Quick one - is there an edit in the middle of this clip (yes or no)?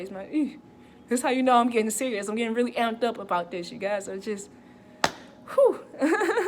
no